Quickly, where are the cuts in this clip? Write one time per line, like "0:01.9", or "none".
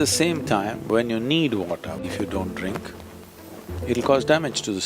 0:02.0